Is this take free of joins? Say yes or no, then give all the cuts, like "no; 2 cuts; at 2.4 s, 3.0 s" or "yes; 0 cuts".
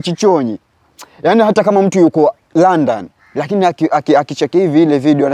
yes; 0 cuts